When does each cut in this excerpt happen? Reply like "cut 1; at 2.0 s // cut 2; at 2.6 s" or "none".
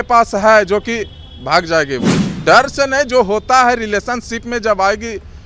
cut 1; at 2.3 s